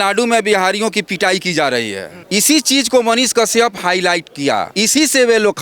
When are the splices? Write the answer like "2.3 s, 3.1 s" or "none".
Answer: 2.1 s, 4.7 s